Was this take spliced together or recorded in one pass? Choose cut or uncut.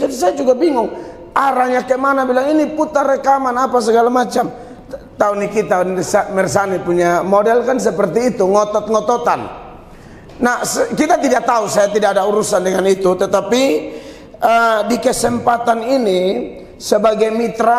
uncut